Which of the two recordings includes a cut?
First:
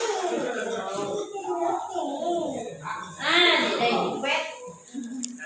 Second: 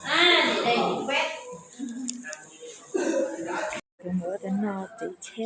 second; 1 cut; at 3.9 s

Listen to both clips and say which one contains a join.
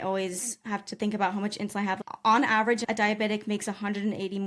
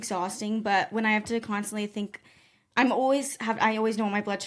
first; 2 cuts; at 2.0 s, 2.8 s

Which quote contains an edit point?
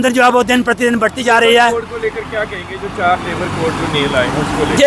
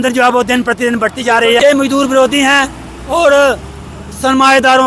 second; 1 cut; at 1.6 s

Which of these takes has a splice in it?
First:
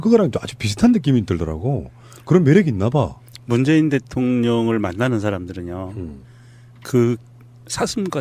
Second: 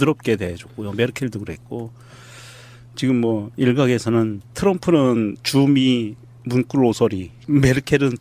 second; 1 cut; at 7.3 s

